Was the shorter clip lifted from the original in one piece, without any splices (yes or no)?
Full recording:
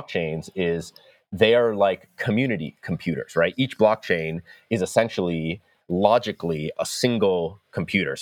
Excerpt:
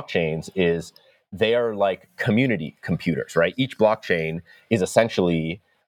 yes